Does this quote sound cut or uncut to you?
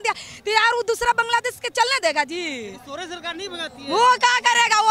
uncut